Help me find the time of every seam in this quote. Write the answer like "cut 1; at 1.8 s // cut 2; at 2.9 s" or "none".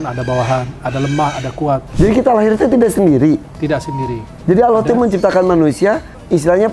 cut 1; at 1.9 s // cut 2; at 3.5 s